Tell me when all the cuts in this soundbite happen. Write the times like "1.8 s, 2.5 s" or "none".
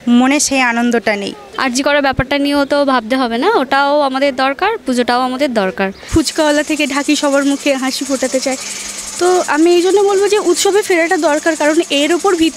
1.5 s, 6.1 s